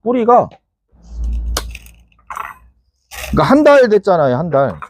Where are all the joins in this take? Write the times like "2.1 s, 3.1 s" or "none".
1.1 s